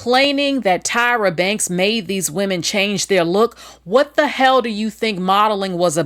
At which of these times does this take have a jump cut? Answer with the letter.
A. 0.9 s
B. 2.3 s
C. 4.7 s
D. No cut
D